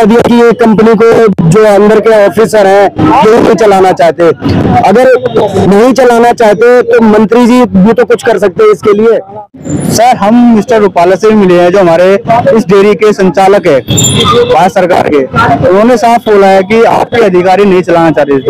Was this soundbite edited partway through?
yes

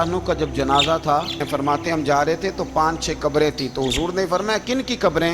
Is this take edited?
yes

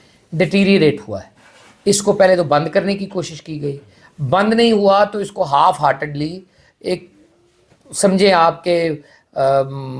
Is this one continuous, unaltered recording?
yes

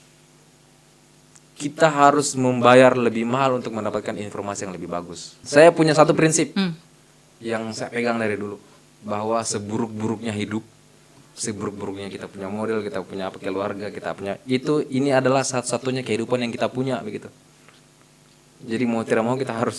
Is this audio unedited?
no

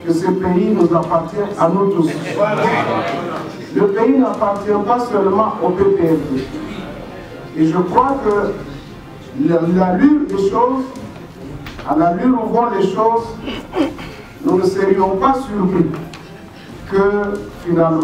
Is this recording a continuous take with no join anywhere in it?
yes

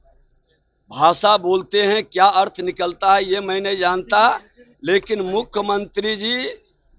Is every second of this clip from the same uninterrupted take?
yes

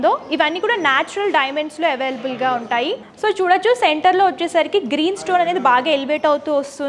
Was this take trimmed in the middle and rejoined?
no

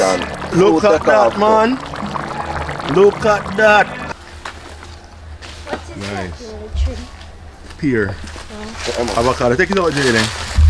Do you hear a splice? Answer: yes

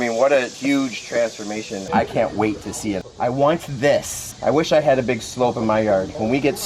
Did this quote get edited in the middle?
yes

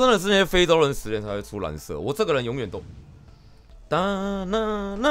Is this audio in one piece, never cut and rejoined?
no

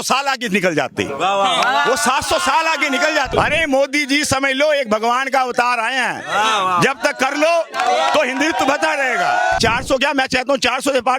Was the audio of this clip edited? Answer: yes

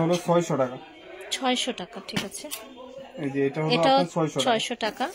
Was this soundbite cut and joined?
no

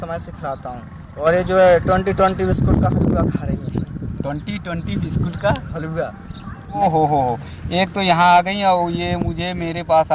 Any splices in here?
yes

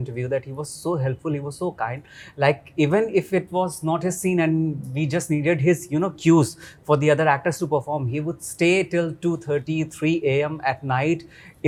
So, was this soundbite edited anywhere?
no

